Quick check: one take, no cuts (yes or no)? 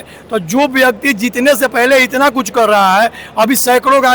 yes